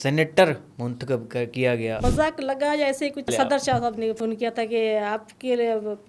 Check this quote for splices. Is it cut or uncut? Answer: cut